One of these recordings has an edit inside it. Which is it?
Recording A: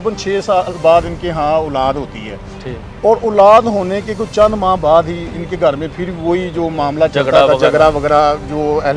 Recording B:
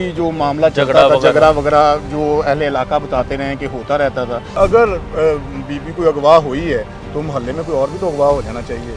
B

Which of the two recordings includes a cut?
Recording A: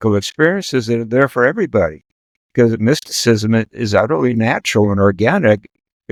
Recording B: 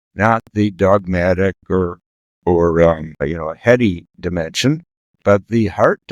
B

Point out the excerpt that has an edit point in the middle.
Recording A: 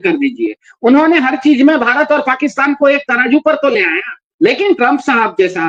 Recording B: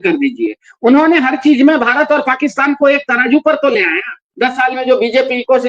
B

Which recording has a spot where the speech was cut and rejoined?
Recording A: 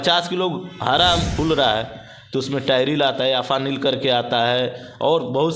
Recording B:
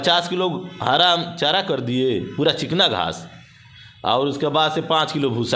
A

